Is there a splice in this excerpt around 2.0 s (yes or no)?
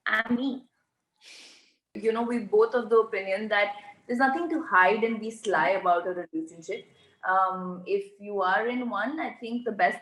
yes